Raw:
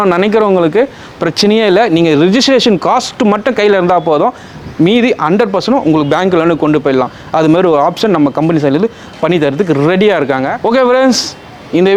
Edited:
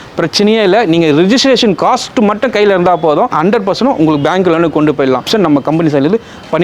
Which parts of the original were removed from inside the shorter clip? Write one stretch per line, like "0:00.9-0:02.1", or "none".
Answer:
0:04.4-0:05.2
0:07.1-0:08.0